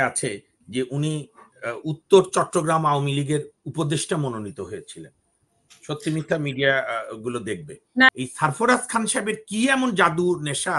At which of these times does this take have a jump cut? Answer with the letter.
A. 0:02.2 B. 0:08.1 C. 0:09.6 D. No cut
B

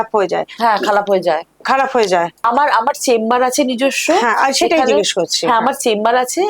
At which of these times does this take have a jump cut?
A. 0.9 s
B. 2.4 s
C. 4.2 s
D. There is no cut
B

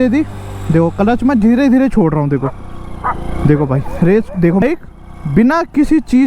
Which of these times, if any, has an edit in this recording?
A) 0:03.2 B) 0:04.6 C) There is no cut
B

